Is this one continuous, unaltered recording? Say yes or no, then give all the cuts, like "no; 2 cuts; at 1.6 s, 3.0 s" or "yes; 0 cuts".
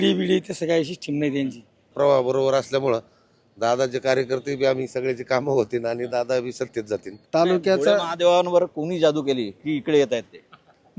no; 2 cuts; at 1.9 s, 7.1 s